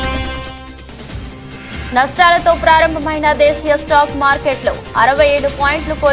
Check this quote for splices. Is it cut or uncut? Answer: cut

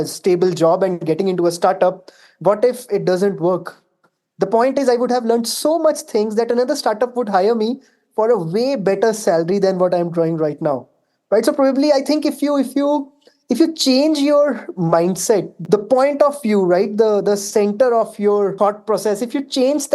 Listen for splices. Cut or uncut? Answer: cut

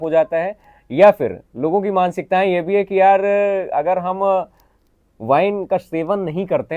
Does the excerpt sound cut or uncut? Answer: uncut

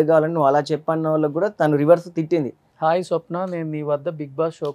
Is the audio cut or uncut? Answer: cut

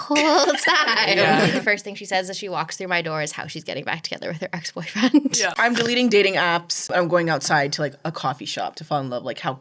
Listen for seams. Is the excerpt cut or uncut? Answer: cut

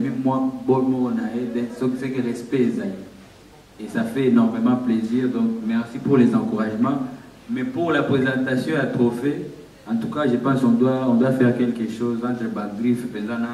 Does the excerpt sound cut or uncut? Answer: uncut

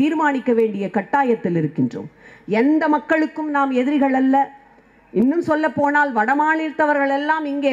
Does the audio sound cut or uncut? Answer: uncut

